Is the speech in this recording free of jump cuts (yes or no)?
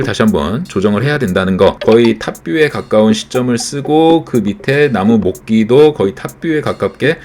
no